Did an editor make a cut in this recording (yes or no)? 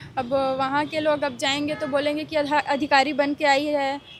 no